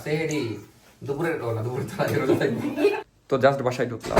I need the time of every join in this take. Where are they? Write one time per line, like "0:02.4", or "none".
0:03.0